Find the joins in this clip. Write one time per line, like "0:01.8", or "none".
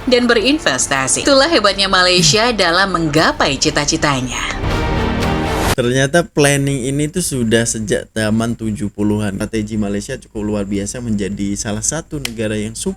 0:01.2
0:04.6
0:09.4